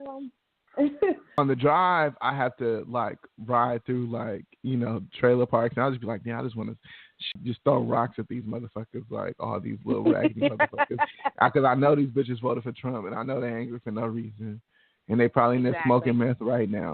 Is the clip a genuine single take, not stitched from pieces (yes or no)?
no